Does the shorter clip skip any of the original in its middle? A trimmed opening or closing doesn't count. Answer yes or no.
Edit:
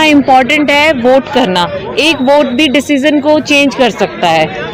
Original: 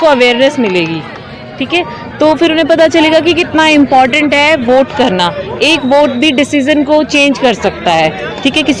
no